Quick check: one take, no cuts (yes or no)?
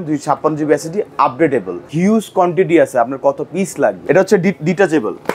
no